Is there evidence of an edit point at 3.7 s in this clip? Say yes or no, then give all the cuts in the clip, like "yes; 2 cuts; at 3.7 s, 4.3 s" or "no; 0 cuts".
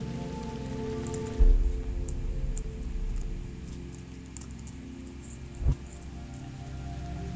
no; 1 cut; at 2.2 s